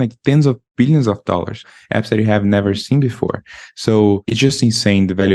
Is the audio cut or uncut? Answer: cut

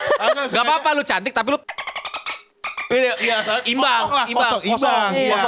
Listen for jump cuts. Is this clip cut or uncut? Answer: uncut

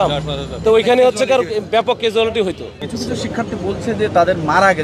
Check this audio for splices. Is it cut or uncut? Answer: cut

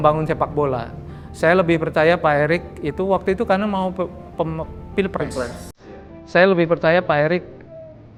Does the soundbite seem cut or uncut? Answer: uncut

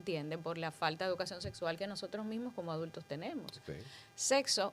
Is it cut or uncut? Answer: uncut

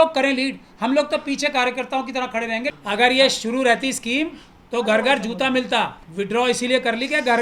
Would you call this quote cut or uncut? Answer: cut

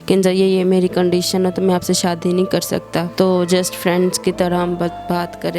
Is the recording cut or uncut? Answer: uncut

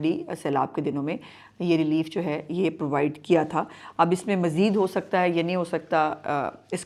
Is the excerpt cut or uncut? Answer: uncut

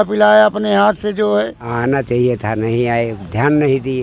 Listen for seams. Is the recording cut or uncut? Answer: cut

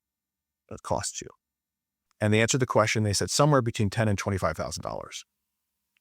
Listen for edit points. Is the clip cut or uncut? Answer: cut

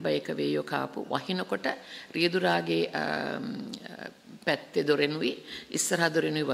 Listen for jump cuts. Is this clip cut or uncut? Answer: uncut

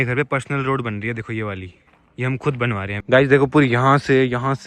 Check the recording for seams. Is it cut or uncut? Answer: cut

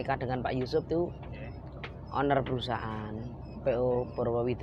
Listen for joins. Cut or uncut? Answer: uncut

